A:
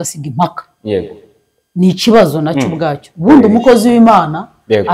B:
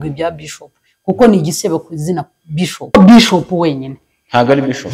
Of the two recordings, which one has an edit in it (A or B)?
B